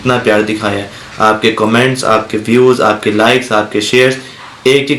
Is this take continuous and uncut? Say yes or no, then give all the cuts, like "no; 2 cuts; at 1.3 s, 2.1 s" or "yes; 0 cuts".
yes; 0 cuts